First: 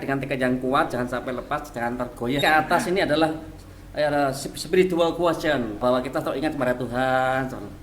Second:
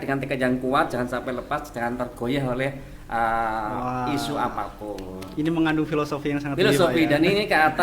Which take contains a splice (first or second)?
first